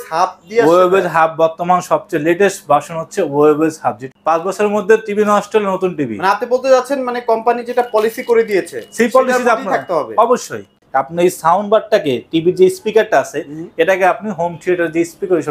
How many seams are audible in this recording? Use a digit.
2